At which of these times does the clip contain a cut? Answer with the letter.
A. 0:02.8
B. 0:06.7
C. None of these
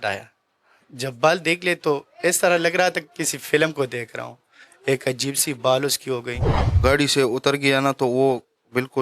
B